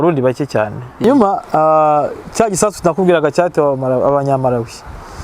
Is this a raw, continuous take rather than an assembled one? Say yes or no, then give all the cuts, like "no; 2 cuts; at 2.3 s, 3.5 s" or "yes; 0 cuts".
no; 1 cut; at 1.0 s